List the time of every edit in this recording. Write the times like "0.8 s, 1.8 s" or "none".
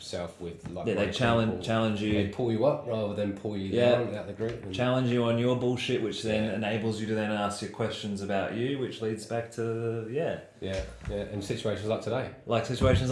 none